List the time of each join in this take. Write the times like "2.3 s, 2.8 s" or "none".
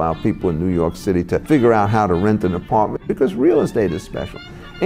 1.4 s, 3.0 s